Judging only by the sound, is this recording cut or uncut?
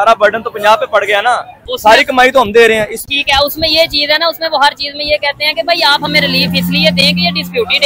cut